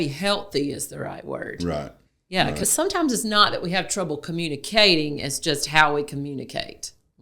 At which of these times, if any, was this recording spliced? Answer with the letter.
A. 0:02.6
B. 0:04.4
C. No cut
A